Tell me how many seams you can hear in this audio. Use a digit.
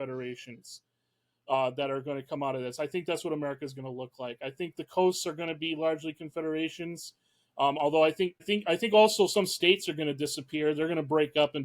0